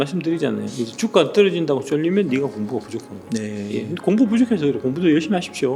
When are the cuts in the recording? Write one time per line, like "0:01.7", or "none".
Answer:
none